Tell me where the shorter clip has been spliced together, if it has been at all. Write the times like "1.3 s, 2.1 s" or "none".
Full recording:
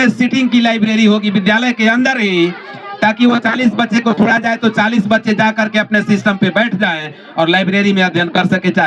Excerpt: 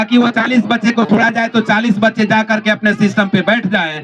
none